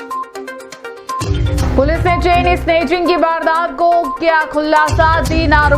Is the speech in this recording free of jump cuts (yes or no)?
no